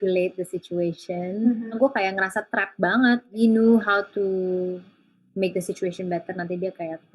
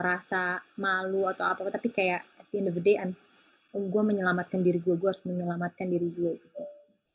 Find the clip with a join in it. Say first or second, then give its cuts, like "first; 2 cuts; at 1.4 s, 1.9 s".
first; 1 cut; at 1.8 s